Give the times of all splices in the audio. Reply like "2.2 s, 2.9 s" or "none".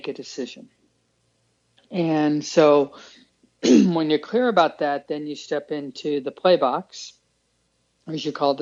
none